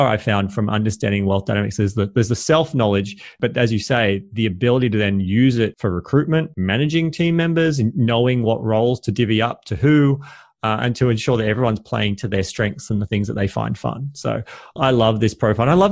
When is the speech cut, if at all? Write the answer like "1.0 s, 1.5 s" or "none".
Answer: 5.8 s, 6.5 s